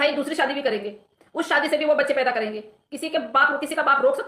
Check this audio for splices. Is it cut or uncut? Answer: uncut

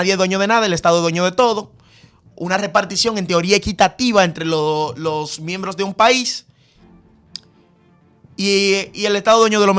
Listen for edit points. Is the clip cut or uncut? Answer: uncut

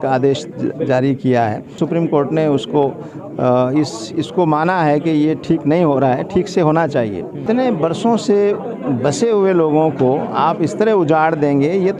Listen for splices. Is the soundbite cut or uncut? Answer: cut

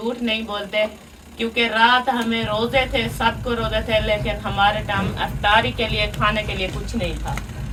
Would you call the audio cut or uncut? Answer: uncut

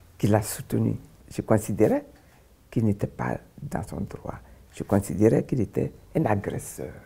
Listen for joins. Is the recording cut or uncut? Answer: cut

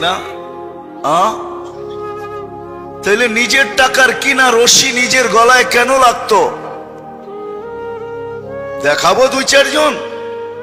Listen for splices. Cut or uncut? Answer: uncut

